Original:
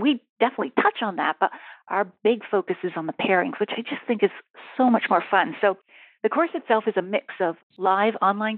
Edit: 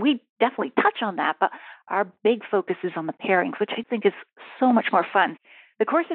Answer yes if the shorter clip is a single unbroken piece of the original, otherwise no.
no